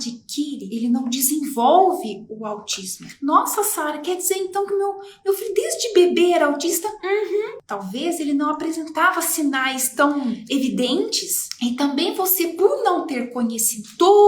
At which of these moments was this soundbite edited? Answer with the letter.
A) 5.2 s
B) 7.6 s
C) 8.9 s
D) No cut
B